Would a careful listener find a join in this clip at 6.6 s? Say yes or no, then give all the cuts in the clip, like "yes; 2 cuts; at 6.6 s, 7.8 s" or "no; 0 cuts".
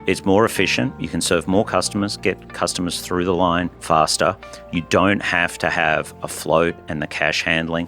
no; 2 cuts; at 1.0 s, 3.8 s